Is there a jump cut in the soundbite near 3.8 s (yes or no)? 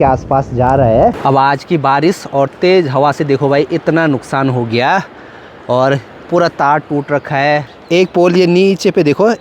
no